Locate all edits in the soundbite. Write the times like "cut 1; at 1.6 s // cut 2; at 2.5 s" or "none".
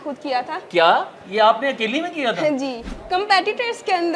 cut 1; at 2.9 s